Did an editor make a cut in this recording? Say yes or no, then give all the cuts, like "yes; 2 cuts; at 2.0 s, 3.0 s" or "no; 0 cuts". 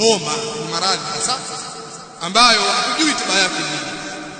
no; 0 cuts